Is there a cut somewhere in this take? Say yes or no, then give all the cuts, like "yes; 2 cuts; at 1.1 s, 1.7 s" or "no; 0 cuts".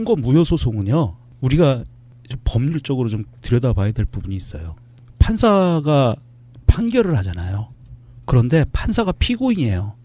yes; 1 cut; at 3.9 s